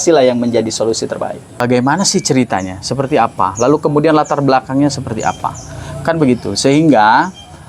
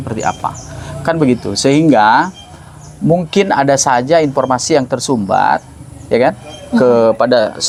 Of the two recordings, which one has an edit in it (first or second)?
first